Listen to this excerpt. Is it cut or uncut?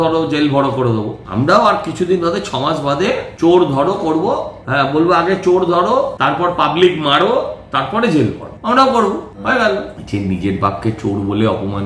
cut